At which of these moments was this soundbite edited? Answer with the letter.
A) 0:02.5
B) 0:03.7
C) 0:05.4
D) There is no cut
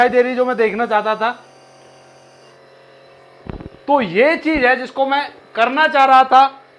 A